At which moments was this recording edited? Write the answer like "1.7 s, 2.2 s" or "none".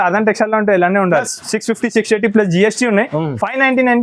none